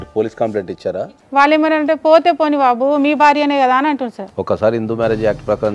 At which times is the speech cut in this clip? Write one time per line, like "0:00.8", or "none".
0:01.0
0:04.2